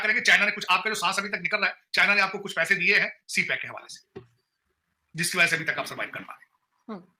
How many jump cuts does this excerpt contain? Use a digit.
0